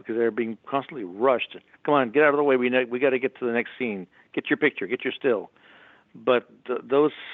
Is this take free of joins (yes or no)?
yes